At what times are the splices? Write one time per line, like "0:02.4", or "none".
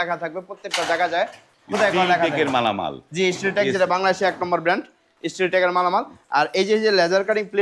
none